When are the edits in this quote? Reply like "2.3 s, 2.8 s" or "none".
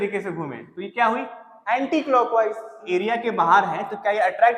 2.8 s